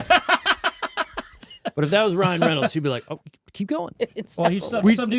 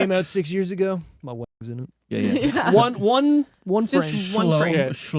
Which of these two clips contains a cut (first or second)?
first